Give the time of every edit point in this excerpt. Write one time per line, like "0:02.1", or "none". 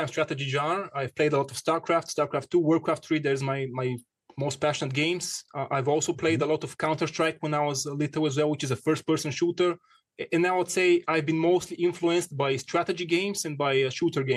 none